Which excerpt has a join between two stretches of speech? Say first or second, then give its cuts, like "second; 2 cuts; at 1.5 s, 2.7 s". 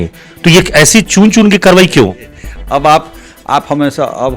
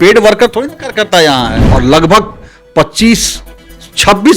second; 1 cut; at 1.6 s